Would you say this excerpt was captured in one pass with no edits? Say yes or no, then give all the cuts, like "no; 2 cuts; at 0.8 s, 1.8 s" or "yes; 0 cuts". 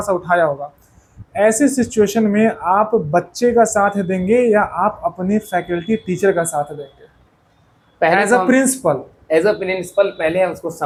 yes; 0 cuts